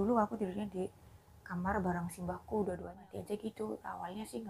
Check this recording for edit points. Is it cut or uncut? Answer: cut